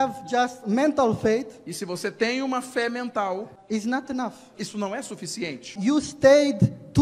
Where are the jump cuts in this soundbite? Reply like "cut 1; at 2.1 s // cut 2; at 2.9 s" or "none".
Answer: cut 1; at 4.5 s